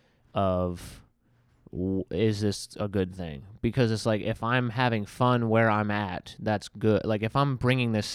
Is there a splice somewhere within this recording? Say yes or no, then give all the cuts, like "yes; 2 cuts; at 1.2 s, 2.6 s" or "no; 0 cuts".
no; 0 cuts